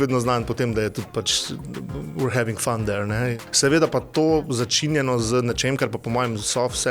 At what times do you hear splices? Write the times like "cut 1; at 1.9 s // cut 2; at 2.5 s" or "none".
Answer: cut 1; at 3.2 s